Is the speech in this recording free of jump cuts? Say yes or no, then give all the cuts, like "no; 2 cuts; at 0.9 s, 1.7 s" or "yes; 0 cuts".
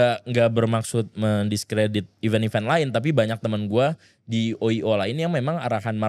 yes; 0 cuts